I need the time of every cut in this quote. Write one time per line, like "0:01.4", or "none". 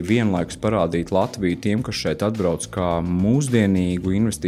none